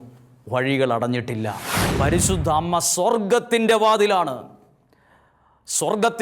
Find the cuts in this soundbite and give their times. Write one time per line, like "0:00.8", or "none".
0:01.8